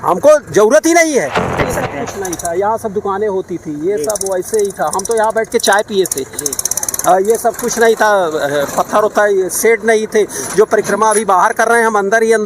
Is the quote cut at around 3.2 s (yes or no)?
no